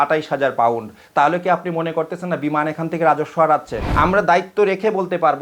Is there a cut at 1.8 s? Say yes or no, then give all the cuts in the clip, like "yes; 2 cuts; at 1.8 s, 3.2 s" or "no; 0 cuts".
no; 1 cut; at 3.8 s